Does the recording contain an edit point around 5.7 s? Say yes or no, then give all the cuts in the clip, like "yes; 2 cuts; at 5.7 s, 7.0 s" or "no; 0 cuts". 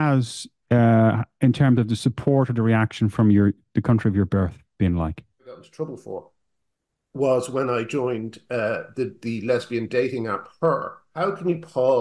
yes; 2 cuts; at 5.7 s, 11.0 s